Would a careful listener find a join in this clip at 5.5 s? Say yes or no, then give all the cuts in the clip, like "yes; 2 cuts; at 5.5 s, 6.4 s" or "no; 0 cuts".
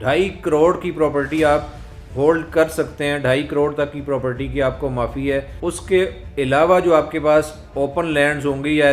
yes; 1 cut; at 5.5 s